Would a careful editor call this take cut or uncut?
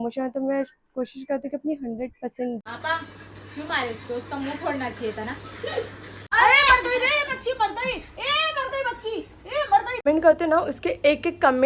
cut